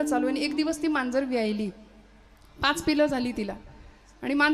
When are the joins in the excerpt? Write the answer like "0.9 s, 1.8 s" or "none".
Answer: none